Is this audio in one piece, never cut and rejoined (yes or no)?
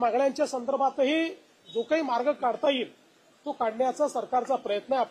yes